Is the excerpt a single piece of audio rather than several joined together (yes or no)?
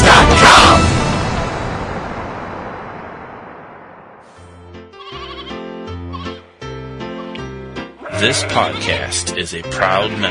no